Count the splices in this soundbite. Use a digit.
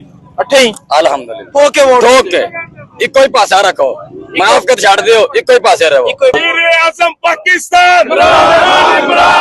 1